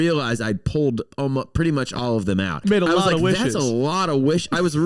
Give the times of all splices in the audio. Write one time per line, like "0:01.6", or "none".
0:02.6